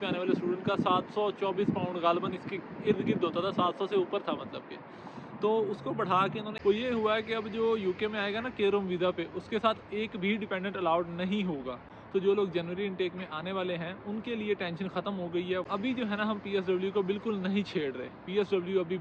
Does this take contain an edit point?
yes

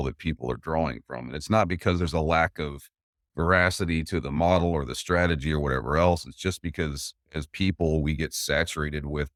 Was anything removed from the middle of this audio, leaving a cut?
no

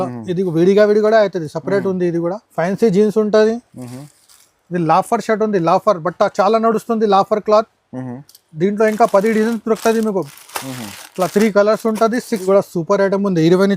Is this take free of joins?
no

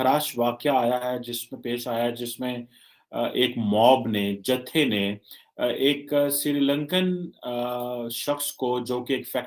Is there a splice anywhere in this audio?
no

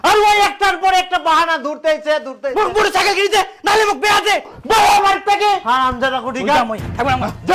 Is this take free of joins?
no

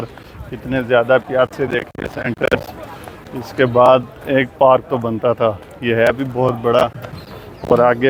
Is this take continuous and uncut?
yes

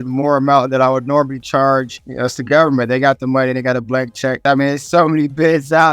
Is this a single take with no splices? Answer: no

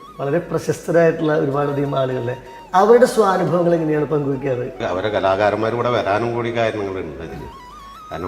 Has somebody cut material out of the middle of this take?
yes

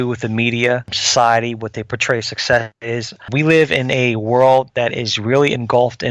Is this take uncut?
no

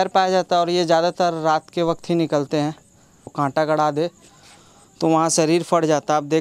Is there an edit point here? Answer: yes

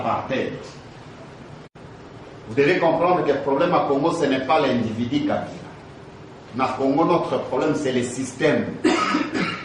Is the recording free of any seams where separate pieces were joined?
no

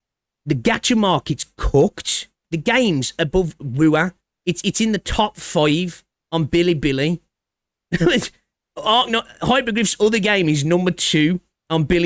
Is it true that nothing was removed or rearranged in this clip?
no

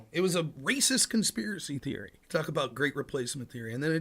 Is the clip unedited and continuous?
no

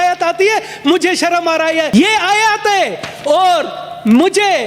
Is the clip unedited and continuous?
no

